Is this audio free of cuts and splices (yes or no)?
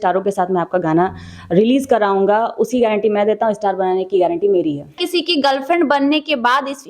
no